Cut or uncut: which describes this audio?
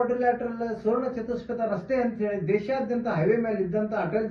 uncut